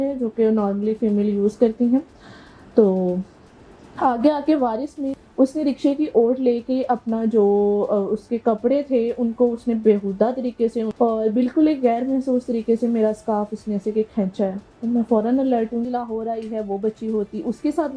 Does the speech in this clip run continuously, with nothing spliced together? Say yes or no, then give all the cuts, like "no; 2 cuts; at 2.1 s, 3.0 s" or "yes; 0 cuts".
no; 3 cuts; at 5.2 s, 10.9 s, 15.9 s